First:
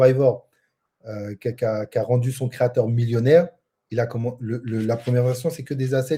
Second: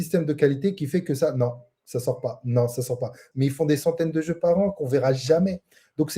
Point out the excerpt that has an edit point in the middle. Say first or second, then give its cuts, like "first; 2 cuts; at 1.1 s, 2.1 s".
second; 1 cut; at 3.2 s